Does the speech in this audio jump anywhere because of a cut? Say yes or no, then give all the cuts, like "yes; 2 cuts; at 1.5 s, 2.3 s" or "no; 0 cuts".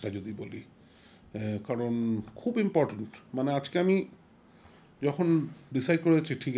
no; 0 cuts